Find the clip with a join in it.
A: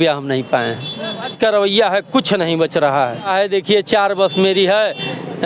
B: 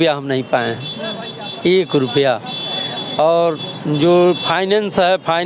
A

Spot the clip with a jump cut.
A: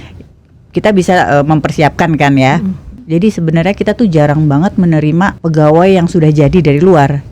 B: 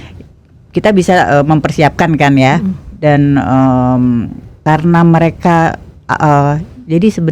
A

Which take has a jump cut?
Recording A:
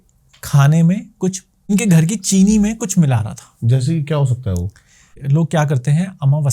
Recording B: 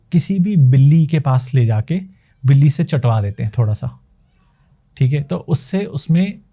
A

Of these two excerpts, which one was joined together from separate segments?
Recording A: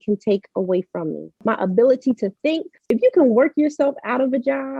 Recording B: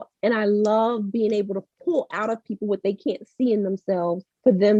A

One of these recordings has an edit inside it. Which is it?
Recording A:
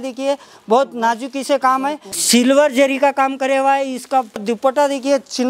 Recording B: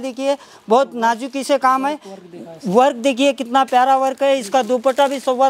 A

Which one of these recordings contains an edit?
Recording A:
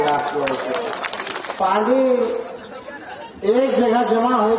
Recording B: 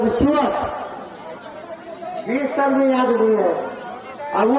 A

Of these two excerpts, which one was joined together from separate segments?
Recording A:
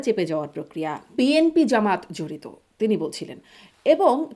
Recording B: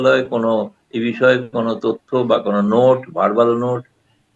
A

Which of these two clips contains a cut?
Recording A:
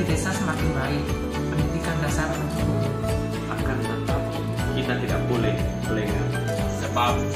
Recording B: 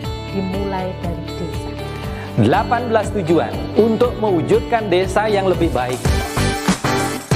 B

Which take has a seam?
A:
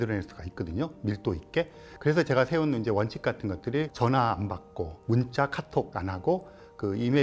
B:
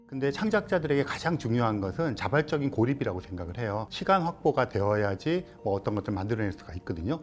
A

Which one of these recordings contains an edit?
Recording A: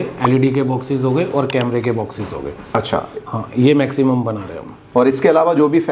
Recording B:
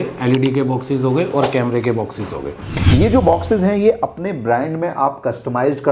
B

